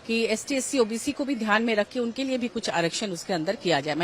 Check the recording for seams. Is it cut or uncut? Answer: uncut